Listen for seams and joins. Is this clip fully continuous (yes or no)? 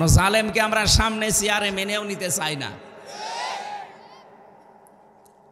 yes